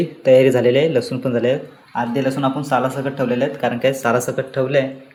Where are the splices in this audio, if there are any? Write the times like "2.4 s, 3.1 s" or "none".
none